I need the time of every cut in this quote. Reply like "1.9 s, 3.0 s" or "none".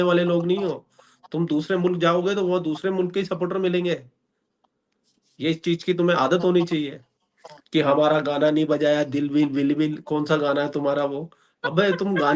none